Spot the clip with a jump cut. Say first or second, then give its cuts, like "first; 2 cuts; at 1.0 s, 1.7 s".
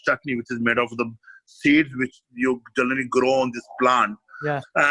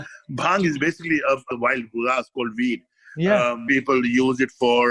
second; 2 cuts; at 1.5 s, 3.6 s